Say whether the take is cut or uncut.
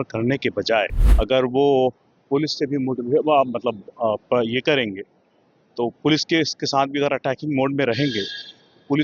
cut